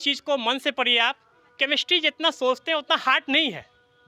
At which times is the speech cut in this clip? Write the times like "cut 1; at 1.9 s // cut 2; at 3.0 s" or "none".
none